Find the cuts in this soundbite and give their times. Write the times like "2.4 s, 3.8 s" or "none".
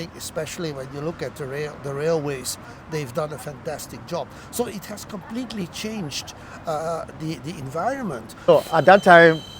8.5 s